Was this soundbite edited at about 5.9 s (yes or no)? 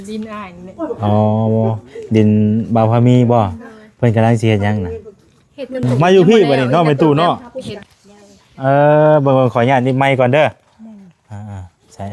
yes